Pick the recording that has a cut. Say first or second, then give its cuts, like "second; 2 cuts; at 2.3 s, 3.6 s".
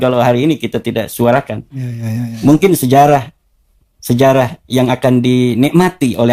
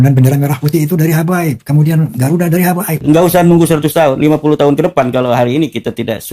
second; 1 cut; at 2.9 s